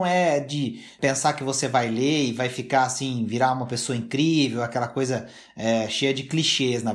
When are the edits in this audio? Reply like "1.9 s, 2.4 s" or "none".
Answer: 0.9 s